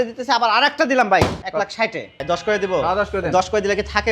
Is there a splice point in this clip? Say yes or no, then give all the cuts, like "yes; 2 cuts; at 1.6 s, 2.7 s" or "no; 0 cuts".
yes; 1 cut; at 1.6 s